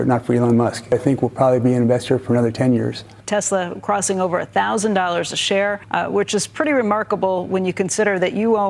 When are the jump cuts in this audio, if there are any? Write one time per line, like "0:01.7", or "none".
0:00.9
0:03.1
0:05.8